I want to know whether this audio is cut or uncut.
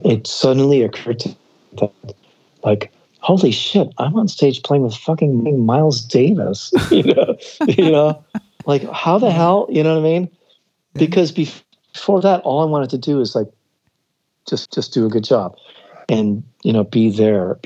uncut